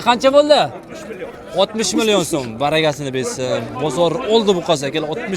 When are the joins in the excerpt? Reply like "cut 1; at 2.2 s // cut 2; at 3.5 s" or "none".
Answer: none